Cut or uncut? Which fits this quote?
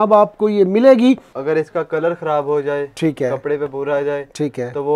cut